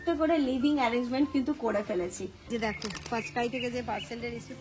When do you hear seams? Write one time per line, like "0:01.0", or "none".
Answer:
0:02.5